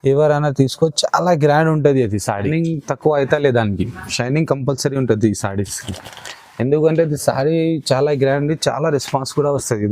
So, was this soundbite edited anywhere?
yes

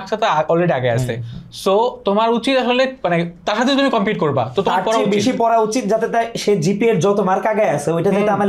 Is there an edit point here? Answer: no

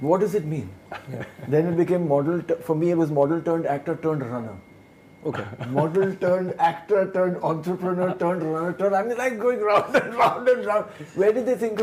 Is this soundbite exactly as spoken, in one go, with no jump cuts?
yes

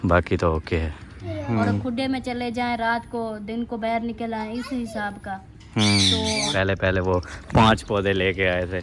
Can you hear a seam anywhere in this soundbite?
yes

